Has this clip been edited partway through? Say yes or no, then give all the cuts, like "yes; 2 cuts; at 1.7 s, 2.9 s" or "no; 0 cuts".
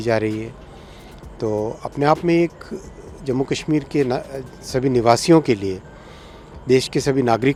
no; 0 cuts